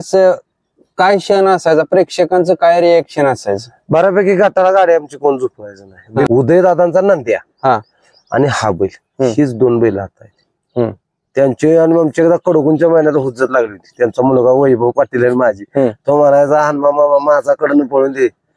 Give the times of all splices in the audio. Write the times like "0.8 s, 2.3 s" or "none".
6.3 s